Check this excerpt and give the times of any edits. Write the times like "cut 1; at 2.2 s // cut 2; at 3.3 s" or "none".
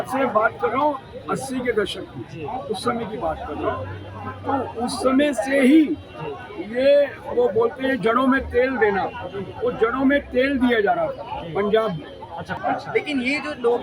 cut 1; at 12.5 s